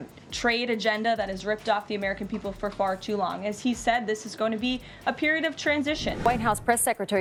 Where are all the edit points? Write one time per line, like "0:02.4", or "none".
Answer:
none

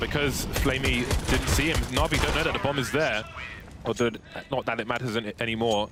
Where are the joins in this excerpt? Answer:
none

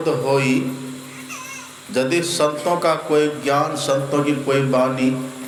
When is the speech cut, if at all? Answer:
none

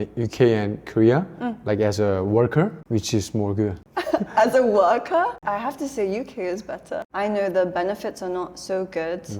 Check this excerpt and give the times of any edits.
0:02.8
0:03.8
0:07.1

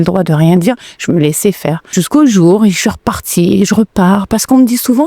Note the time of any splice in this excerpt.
0:01.8

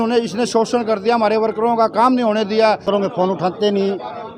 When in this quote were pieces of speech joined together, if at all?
0:02.8

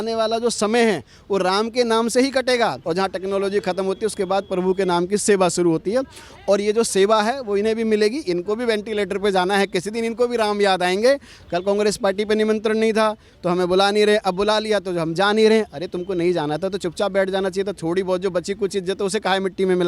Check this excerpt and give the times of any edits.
0:02.8
0:11.4

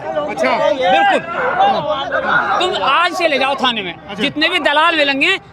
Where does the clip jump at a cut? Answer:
none

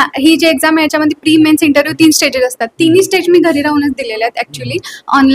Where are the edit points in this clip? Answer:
none

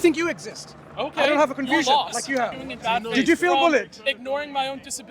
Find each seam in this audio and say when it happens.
0:02.7

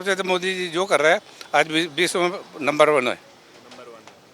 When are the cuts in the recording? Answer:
none

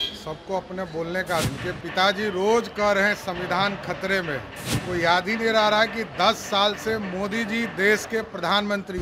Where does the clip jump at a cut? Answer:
0:01.5
0:04.6

